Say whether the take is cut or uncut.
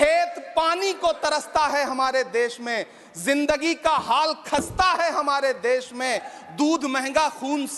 uncut